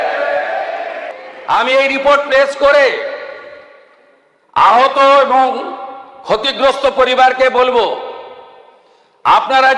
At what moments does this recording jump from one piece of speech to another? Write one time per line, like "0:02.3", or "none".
0:01.0